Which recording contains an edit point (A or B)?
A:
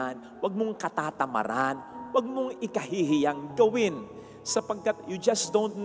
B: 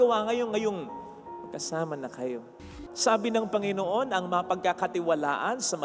B